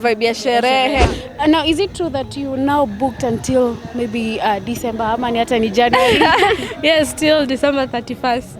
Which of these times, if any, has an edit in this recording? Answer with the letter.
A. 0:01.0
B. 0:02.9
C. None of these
A